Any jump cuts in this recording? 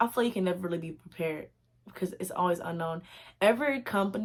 no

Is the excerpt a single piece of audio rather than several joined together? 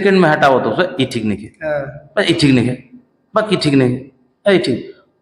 yes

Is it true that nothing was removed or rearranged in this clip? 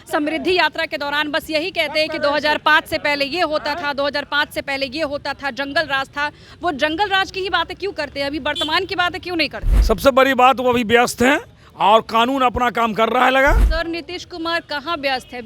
no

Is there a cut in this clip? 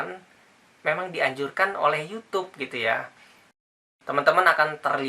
yes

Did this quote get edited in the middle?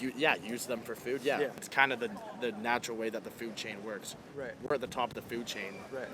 yes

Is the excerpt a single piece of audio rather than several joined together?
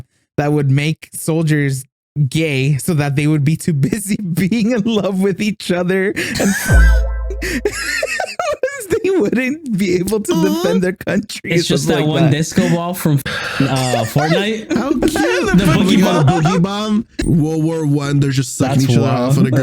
no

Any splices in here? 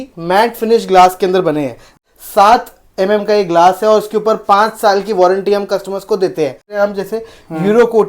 yes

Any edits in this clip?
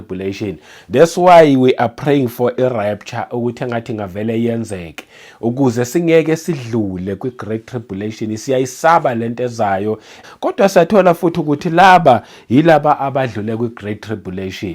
no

